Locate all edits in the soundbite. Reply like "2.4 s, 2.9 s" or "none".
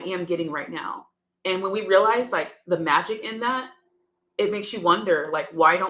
none